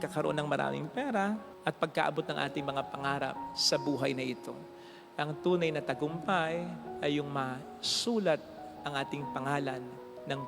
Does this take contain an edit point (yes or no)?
no